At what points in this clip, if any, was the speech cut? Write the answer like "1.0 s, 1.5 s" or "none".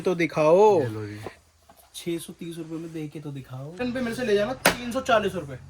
3.8 s